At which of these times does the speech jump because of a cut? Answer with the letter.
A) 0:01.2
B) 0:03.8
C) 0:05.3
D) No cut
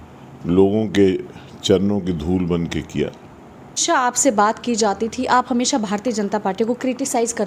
B